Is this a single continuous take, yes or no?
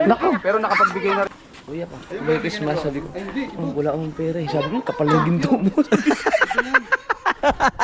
no